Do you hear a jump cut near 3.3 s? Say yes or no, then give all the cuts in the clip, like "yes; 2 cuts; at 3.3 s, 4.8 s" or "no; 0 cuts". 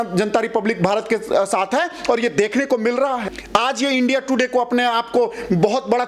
yes; 1 cut; at 3.3 s